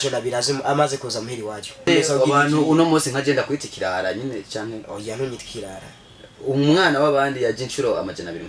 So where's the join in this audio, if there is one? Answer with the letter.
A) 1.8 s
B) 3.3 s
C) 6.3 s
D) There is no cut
A